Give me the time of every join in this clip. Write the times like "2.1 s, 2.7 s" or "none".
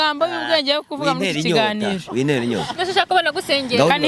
none